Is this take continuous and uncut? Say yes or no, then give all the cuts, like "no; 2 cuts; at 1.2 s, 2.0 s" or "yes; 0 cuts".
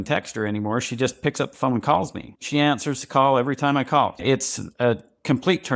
no; 2 cuts; at 2.3 s, 4.2 s